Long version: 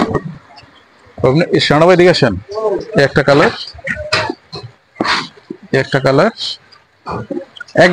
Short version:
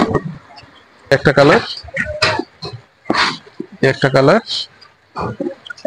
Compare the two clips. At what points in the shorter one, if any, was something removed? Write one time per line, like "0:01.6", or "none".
0:01.1